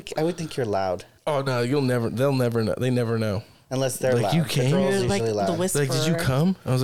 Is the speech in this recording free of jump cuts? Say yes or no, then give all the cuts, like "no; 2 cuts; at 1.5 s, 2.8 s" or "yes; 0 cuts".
no; 2 cuts; at 1.1 s, 3.5 s